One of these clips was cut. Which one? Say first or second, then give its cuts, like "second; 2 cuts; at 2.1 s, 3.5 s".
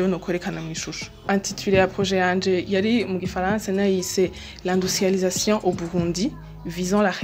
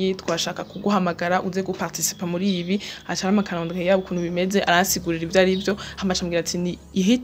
first; 1 cut; at 1.2 s